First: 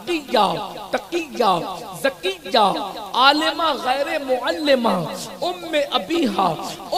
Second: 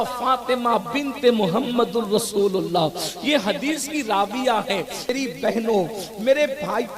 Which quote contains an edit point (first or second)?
second